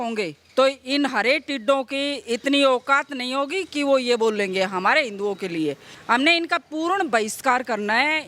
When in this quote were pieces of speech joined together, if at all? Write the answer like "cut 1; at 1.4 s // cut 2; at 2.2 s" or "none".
none